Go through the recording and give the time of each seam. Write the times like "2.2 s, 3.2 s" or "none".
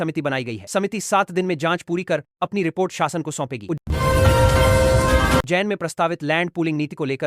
3.8 s, 5.5 s